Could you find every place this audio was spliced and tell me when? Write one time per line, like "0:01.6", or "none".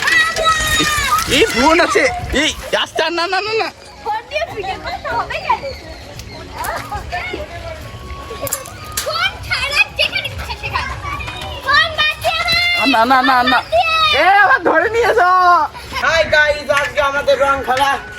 0:15.9